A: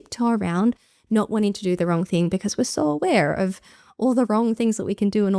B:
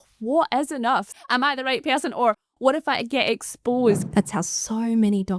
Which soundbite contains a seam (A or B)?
B